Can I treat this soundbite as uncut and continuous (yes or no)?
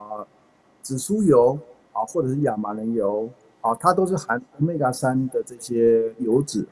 yes